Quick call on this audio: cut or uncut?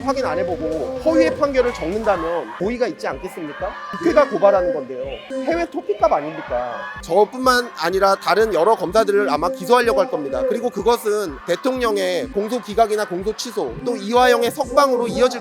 cut